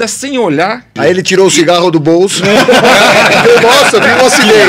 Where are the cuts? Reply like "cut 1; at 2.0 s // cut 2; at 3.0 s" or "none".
cut 1; at 1.0 s